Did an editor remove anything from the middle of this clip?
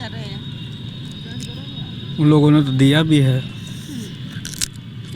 yes; 1 cut; at 3.5 s

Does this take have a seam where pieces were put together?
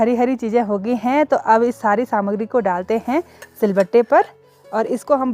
no; 0 cuts

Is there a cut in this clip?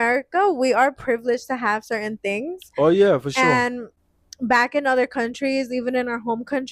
no; 0 cuts

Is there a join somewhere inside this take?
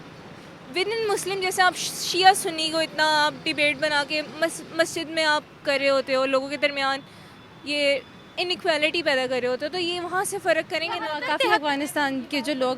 yes; 1 cut; at 11.2 s

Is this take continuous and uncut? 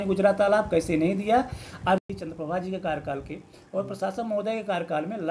no; 1 cut; at 2.0 s

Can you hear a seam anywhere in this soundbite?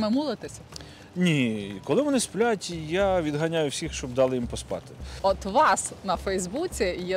yes; 1 cut; at 5.0 s

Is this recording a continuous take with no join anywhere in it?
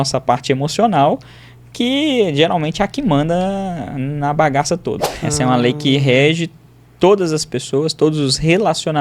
no; 1 cut; at 5.3 s

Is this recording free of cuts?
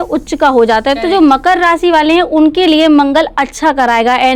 yes; 0 cuts

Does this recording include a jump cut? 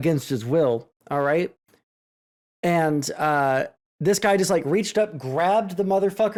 no; 0 cuts

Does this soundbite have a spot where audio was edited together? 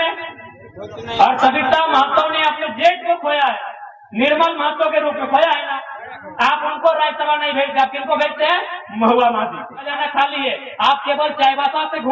yes; 1 cut; at 10.0 s

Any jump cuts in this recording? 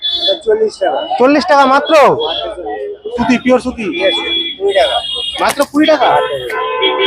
yes; 1 cut; at 3.2 s

